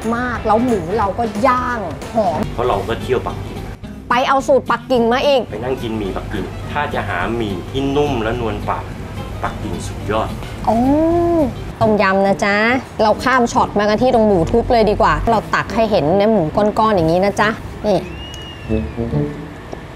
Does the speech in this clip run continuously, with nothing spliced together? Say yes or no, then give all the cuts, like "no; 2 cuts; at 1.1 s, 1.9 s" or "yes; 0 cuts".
no; 2 cuts; at 2.5 s, 11.6 s